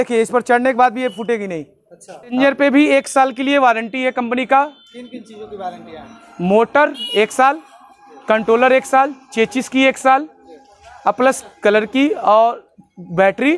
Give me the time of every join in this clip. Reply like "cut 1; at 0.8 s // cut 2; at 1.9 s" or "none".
cut 1; at 2.3 s